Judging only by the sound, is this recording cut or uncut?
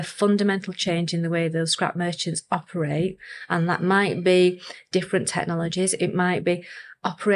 uncut